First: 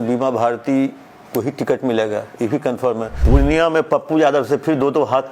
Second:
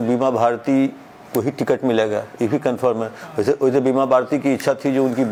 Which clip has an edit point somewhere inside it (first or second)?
first